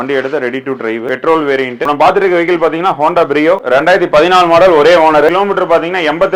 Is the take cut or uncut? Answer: cut